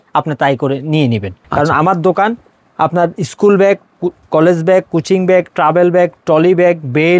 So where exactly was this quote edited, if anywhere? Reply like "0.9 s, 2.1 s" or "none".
1.3 s